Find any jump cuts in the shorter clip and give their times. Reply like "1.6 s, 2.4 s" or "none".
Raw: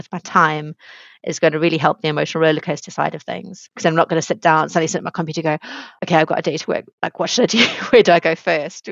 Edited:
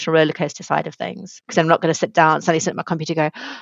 none